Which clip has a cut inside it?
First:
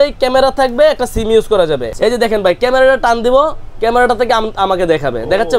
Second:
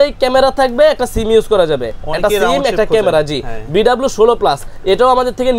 first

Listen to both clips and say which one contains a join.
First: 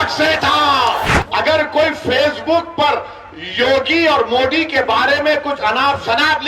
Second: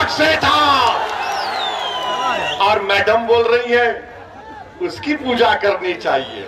first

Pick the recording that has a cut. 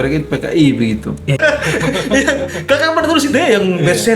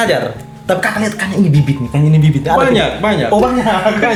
first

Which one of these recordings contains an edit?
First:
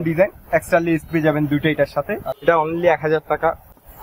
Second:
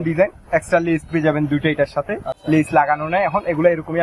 first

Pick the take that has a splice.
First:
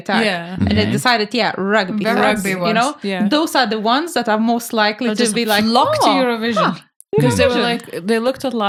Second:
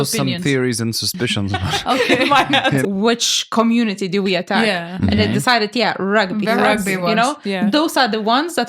second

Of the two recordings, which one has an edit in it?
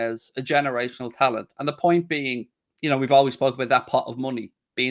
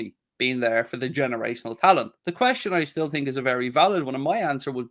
second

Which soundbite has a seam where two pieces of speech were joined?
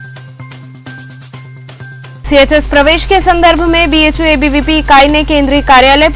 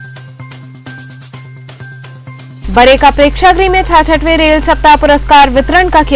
second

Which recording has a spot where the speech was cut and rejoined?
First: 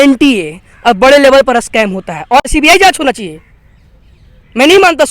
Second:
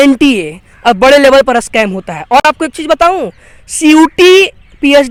first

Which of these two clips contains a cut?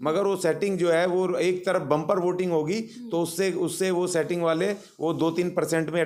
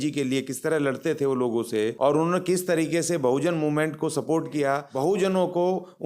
second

